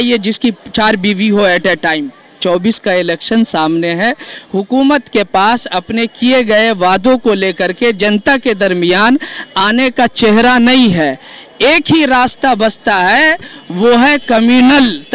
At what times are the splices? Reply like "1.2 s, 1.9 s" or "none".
2.4 s